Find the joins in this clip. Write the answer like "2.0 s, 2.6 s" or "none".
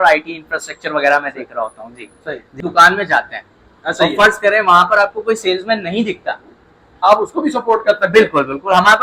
2.5 s, 7.0 s

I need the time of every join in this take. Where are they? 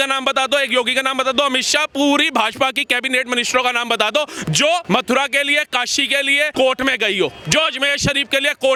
none

